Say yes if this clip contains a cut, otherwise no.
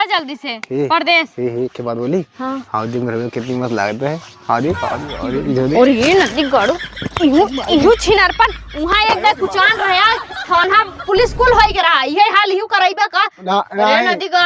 no